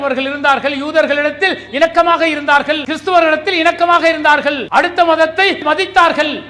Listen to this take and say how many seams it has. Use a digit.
3